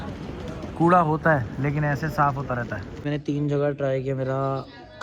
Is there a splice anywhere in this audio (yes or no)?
yes